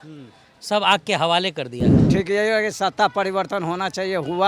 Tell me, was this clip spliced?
yes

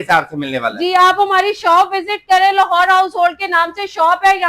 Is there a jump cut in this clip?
no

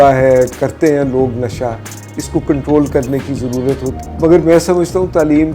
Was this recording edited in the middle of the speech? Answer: yes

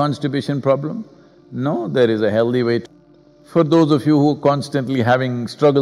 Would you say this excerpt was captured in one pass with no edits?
no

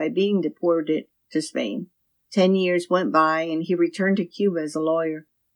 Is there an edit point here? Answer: yes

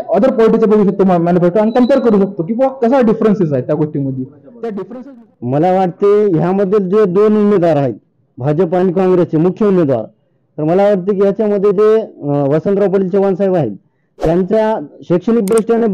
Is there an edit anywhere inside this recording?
yes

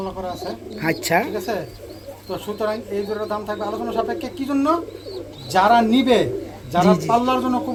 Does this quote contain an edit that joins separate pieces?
no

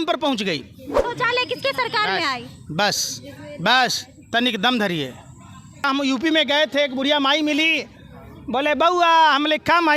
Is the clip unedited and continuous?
no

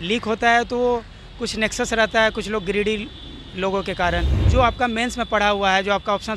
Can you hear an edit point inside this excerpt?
yes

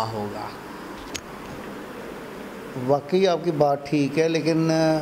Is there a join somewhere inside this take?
no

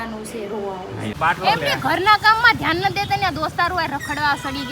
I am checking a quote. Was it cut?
yes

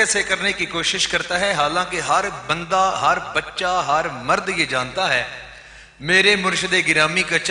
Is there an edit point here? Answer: no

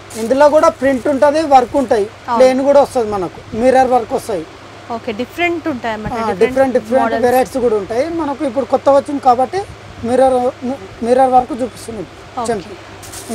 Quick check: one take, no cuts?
yes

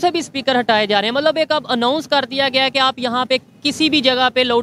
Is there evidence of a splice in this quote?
no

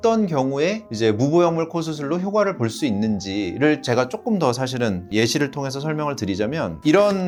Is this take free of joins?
yes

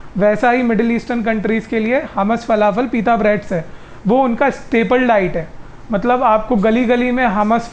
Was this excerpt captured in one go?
yes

